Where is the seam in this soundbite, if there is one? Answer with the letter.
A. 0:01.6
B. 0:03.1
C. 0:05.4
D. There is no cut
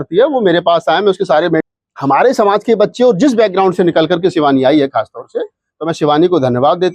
A